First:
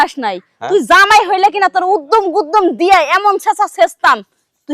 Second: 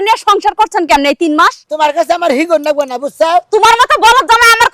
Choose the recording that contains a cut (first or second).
second